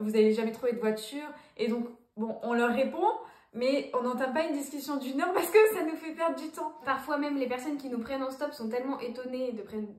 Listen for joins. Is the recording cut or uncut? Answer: uncut